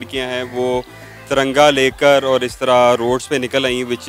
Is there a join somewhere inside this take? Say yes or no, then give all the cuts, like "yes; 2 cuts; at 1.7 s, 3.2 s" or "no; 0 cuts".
no; 0 cuts